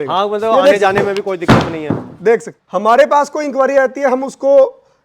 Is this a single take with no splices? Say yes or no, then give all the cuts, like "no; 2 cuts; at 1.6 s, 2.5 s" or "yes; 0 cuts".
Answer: no; 1 cut; at 2.6 s